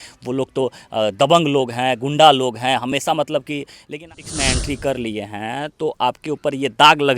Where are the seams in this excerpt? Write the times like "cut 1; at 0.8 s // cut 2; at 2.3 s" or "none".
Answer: cut 1; at 4.1 s